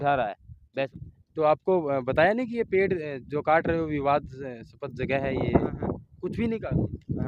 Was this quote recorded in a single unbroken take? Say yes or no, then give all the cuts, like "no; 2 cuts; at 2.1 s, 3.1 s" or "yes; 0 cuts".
no; 1 cut; at 0.9 s